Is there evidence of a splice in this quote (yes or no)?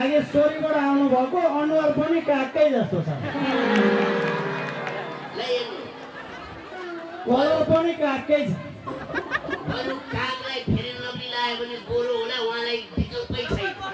no